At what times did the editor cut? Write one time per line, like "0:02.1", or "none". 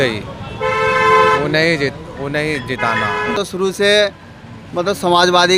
0:03.3